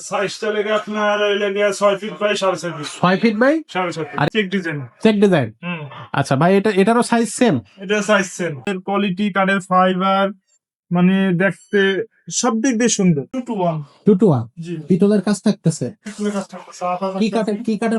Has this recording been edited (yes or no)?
yes